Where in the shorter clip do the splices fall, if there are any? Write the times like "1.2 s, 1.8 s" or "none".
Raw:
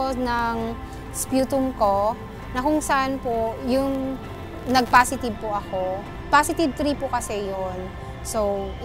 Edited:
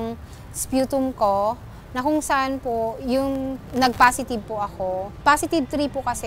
3.6 s, 5.1 s